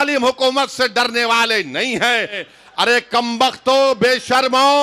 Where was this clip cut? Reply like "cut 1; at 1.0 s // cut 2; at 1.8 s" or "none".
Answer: cut 1; at 2.5 s

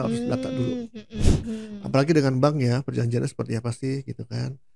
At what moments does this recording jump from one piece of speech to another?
cut 1; at 1.1 s

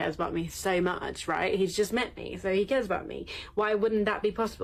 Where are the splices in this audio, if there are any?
none

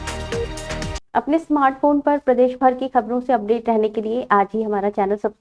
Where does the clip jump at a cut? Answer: none

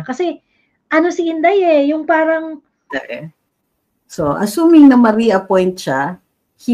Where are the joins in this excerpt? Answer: cut 1; at 2.8 s

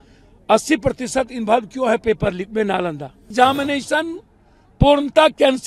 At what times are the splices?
cut 1; at 3.3 s

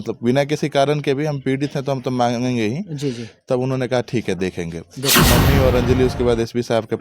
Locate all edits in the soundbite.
cut 1; at 5.2 s

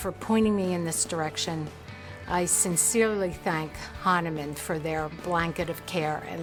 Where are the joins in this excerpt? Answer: none

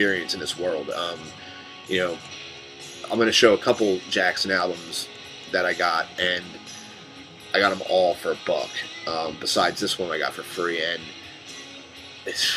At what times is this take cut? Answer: none

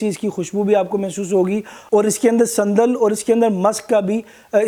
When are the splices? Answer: none

